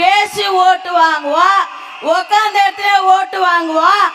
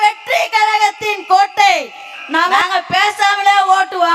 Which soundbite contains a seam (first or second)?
second